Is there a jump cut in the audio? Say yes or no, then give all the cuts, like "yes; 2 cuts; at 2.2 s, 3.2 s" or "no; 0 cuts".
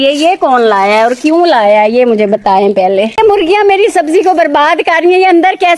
yes; 1 cut; at 3.2 s